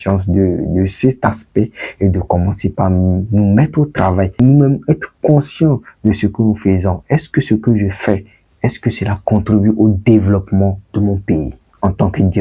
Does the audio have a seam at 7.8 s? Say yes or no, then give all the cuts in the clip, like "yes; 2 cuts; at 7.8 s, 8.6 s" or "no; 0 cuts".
no; 1 cut; at 4.4 s